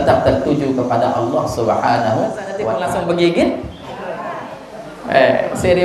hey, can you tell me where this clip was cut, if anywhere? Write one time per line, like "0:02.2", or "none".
0:02.6

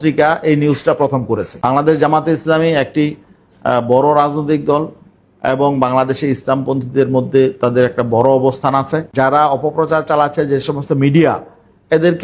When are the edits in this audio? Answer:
0:01.6
0:09.1

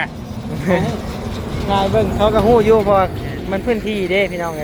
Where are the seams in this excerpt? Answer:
none

